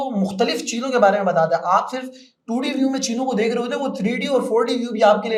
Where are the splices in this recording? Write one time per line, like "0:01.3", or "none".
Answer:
none